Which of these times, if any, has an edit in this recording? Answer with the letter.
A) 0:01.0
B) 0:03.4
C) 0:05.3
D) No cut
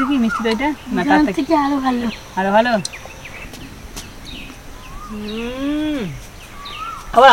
B